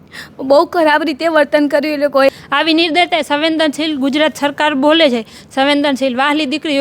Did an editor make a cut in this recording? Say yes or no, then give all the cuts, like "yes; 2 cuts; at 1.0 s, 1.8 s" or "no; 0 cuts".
yes; 1 cut; at 2.3 s